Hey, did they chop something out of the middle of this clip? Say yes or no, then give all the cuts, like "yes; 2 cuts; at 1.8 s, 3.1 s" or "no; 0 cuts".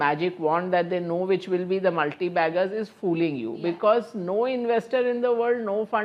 no; 0 cuts